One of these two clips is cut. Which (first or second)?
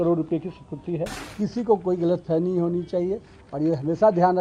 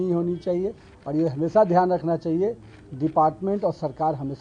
first